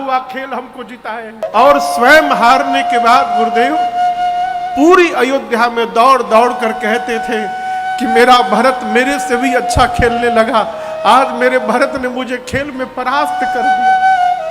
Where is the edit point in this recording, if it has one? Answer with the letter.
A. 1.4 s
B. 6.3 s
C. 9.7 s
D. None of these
A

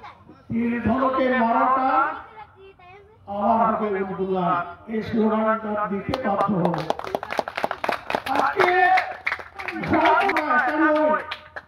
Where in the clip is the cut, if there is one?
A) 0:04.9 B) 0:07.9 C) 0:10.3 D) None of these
C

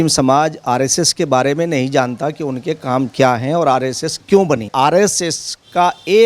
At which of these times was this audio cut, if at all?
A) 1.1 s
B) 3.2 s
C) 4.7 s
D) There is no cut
C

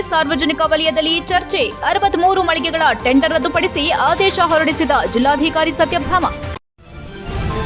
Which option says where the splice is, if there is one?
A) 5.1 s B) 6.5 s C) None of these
B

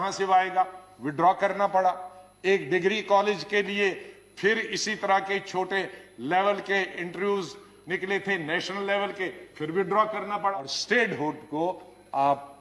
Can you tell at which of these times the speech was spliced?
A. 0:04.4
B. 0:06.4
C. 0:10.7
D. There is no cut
C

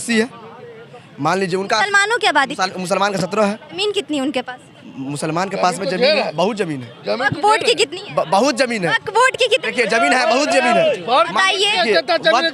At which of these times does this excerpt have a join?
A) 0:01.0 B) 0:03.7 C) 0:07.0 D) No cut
B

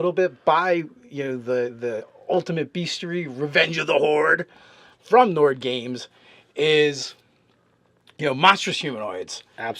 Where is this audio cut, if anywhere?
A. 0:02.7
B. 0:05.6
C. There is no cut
B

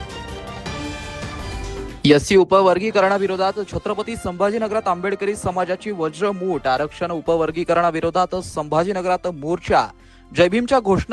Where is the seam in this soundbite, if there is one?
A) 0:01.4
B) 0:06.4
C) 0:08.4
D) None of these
A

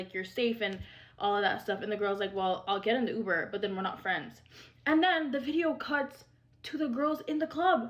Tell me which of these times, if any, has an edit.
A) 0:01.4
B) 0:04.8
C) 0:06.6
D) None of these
B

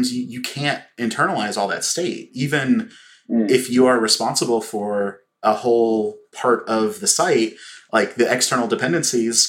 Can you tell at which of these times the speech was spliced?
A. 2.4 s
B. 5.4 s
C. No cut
B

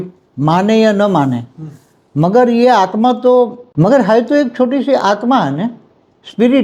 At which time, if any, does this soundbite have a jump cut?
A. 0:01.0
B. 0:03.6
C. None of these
B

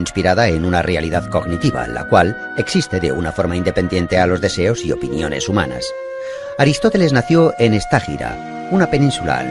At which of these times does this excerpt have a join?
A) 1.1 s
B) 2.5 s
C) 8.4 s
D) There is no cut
D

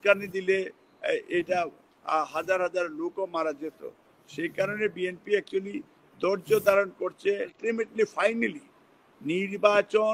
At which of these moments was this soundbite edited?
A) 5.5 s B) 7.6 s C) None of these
B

